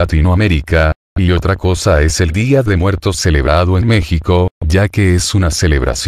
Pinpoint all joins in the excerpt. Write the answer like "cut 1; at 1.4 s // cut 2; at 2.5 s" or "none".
none